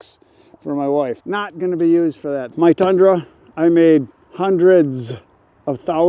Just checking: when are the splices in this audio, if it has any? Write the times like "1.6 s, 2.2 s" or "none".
1.2 s, 2.5 s